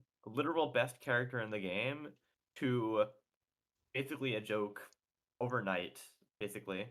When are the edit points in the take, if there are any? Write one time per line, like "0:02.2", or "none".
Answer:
none

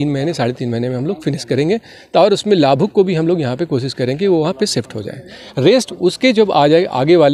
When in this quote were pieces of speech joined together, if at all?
none

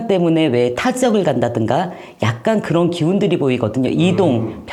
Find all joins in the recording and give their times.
none

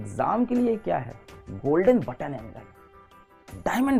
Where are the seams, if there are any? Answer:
none

